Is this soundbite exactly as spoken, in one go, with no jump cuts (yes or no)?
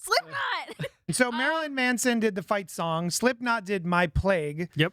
no